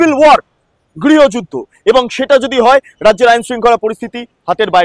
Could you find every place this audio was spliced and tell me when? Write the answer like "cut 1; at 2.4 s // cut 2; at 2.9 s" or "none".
none